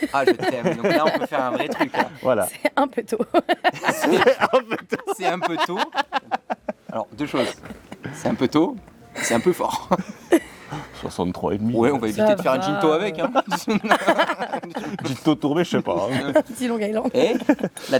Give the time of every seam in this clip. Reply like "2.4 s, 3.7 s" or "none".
none